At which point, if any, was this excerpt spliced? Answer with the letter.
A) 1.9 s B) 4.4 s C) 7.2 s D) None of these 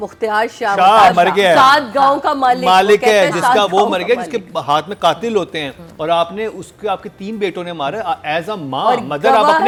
D